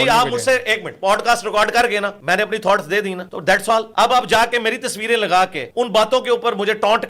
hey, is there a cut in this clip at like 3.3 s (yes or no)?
yes